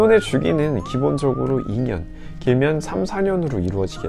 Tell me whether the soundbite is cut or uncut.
uncut